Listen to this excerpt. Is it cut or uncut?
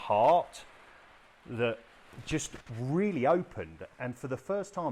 cut